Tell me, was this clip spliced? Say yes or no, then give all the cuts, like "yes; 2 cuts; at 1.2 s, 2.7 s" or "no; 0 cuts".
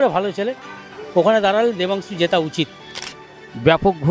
yes; 1 cut; at 3.0 s